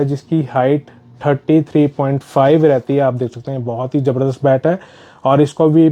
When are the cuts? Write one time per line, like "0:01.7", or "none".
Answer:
none